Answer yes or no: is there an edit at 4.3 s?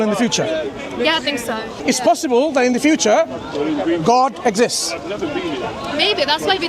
no